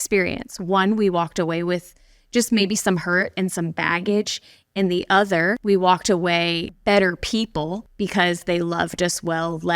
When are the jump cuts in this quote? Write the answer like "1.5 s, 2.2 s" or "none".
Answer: 5.6 s, 6.7 s, 7.8 s